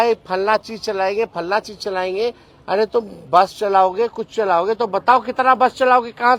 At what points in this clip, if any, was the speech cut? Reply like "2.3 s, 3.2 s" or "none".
none